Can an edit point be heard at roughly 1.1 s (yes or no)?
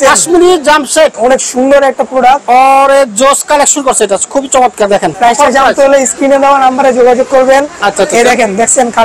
yes